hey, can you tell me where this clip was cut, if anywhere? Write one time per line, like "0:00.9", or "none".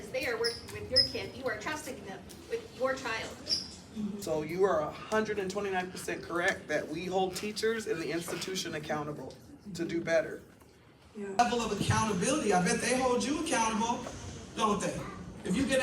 0:04.2
0:11.4